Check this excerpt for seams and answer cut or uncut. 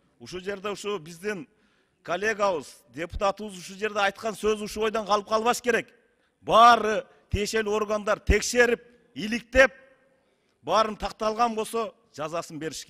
uncut